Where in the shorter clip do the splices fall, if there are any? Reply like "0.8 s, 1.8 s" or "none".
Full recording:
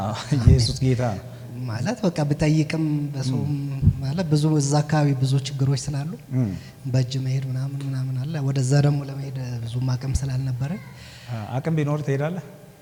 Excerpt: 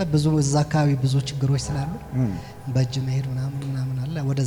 none